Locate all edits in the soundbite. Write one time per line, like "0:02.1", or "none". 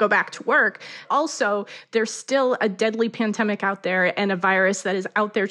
0:01.0